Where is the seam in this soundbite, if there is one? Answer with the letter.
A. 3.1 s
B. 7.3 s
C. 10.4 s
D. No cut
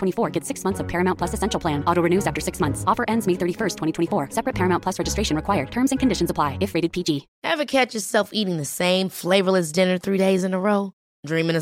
B